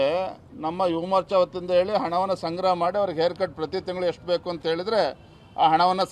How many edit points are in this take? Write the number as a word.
zero